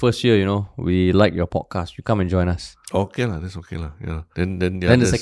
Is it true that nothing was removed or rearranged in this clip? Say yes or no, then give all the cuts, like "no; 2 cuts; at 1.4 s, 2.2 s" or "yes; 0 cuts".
no; 2 cuts; at 2.7 s, 4.2 s